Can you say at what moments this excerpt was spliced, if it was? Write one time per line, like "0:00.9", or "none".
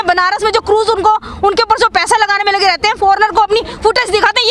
none